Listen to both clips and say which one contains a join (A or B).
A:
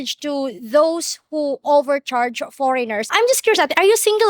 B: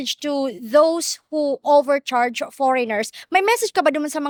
A